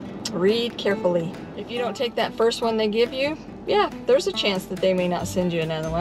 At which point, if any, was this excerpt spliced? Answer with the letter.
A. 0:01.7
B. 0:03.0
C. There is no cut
A